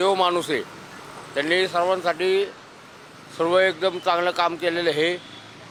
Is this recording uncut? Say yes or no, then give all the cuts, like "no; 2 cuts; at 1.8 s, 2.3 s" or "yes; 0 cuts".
yes; 0 cuts